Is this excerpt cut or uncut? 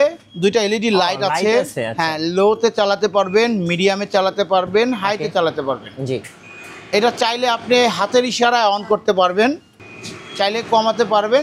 uncut